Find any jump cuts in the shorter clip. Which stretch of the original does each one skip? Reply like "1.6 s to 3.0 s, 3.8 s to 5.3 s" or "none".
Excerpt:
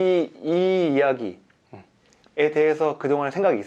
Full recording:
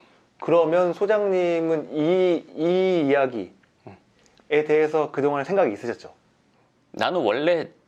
none